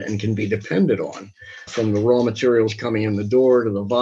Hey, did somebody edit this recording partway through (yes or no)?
no